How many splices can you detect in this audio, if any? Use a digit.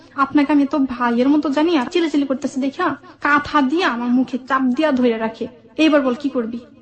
1